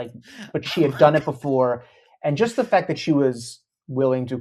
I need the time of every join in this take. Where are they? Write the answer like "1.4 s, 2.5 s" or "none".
none

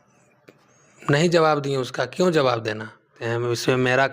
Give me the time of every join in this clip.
3.2 s

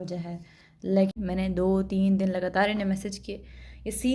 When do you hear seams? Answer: 1.2 s

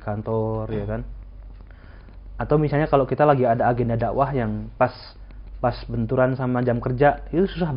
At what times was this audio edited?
none

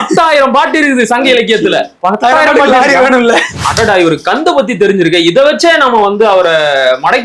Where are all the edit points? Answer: 3.6 s

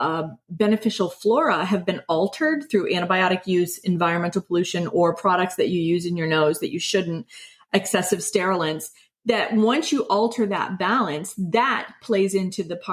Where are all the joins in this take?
none

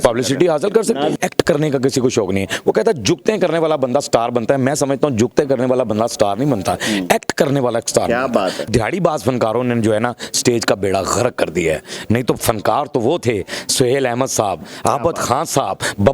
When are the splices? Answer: 1.1 s, 8.7 s

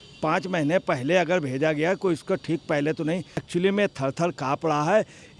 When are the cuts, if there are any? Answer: 3.4 s

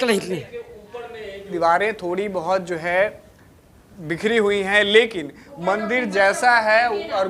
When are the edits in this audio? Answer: 1.5 s

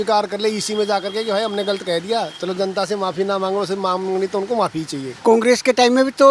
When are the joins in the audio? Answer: 5.1 s

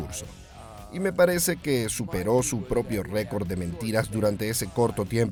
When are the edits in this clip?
none

